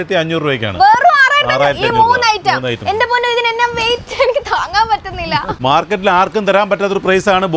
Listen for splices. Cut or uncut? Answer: cut